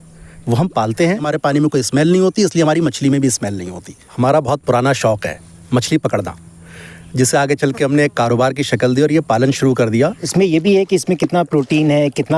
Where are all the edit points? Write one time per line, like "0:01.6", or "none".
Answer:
0:01.2
0:04.1
0:10.2